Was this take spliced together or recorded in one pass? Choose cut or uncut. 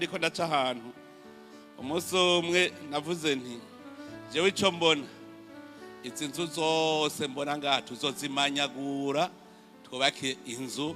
uncut